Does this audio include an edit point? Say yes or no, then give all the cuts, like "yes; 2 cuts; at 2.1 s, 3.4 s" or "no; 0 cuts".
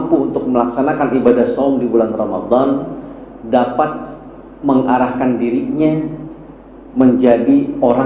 no; 0 cuts